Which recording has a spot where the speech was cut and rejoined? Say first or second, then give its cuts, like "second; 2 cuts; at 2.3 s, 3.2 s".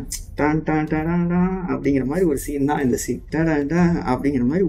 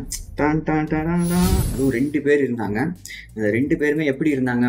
second; 1 cut; at 1.6 s